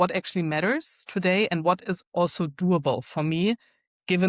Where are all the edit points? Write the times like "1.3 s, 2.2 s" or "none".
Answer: none